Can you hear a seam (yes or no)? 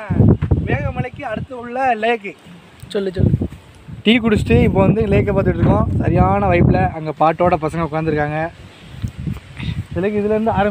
no